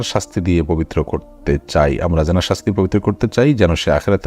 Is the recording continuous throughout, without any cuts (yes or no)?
yes